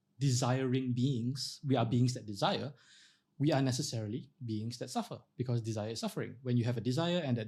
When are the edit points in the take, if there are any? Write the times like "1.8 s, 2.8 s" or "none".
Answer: none